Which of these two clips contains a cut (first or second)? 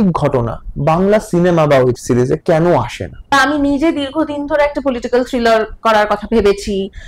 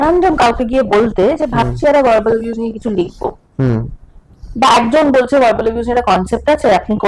first